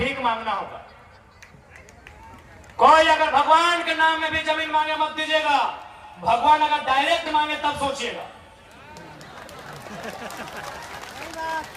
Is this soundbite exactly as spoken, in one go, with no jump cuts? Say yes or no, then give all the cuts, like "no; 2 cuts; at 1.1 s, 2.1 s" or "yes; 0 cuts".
yes; 0 cuts